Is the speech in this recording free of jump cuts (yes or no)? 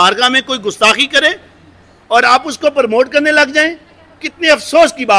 yes